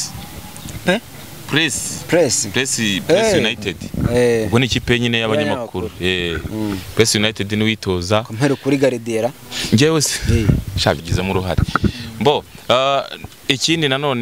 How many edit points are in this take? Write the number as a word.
one